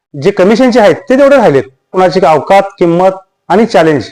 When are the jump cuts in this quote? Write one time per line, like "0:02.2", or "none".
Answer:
0:01.9